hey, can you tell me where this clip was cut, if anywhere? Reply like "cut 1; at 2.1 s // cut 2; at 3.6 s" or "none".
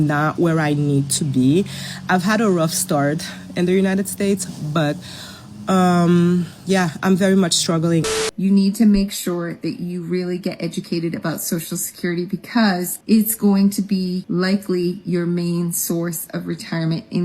cut 1; at 8.1 s